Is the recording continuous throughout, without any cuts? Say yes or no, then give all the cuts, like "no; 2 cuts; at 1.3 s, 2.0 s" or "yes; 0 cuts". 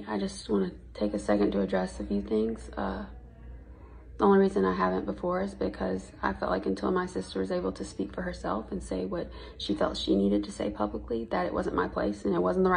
yes; 0 cuts